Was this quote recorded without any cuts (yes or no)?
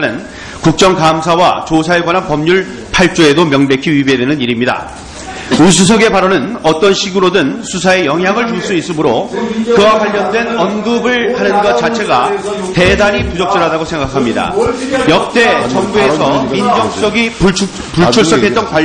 no